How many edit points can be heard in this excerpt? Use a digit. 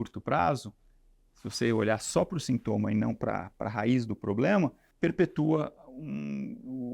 1